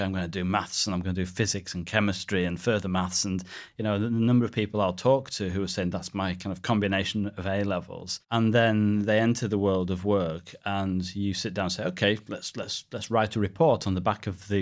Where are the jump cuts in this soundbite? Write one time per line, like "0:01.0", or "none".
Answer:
none